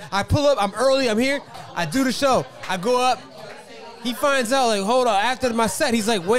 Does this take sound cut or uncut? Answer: cut